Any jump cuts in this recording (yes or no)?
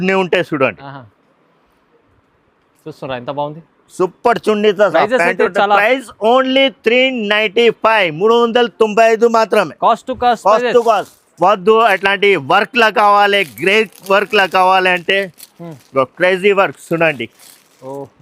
no